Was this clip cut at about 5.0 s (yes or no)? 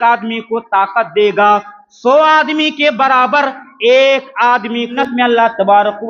yes